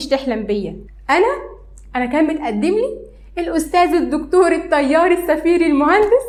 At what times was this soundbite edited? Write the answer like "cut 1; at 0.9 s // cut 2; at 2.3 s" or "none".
none